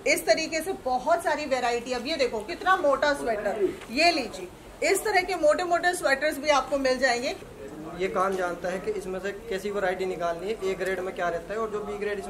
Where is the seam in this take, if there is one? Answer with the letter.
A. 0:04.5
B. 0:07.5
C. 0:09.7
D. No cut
B